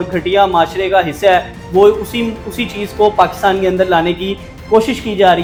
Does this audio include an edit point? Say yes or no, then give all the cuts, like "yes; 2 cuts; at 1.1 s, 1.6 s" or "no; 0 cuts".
no; 0 cuts